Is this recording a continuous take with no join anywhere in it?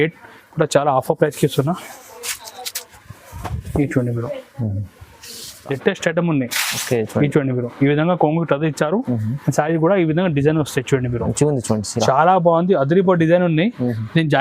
no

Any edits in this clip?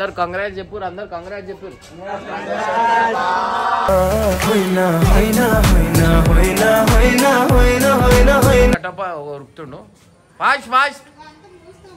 yes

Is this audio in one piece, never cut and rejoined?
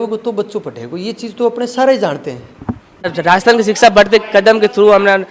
no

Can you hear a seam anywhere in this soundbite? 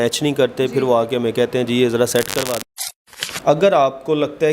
yes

